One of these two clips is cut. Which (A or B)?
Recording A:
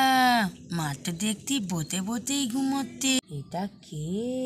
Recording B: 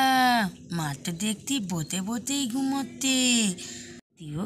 A